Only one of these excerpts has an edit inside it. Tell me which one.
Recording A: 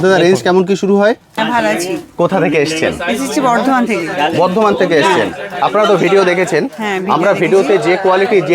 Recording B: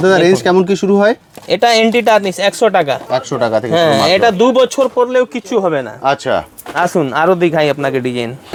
A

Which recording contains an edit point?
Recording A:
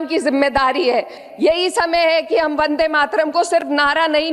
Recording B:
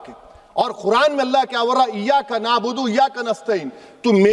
A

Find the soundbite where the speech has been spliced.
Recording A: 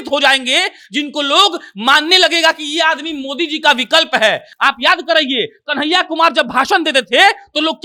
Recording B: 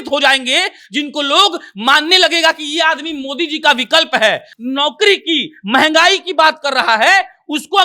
B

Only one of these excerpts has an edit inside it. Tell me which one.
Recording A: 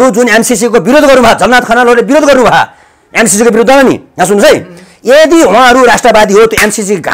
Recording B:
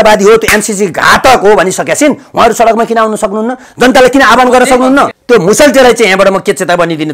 B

